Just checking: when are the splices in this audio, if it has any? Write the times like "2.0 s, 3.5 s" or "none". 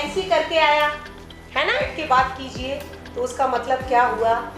1.9 s